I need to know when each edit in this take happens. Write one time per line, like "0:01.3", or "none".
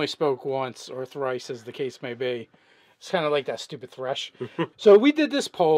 0:04.8